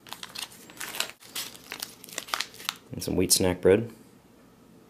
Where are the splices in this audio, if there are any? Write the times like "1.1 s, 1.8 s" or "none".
3.4 s